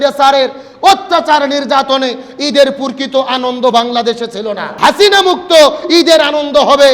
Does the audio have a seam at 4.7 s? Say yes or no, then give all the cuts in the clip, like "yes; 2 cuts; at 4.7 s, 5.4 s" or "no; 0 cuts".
yes; 1 cut; at 4.7 s